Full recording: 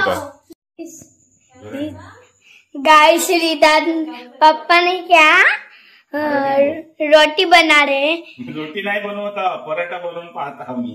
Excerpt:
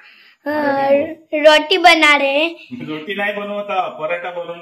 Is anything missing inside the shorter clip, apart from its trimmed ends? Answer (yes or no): no